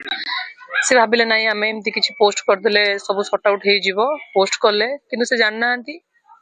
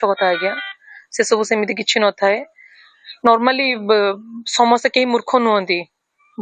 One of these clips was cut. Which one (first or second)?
second